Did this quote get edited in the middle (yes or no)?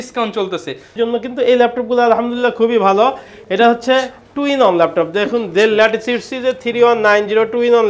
yes